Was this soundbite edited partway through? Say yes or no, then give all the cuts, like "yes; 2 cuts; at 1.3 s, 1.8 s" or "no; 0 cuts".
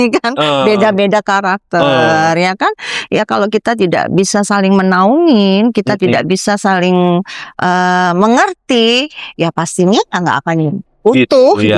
no; 0 cuts